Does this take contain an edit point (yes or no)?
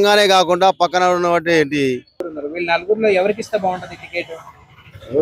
yes